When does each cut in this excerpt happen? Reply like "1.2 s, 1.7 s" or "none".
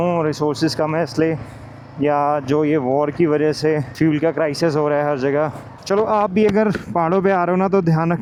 none